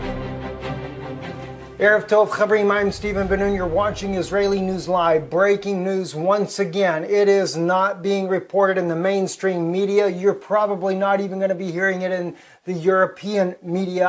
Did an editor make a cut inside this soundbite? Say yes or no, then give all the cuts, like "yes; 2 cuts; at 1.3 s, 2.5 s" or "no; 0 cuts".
no; 0 cuts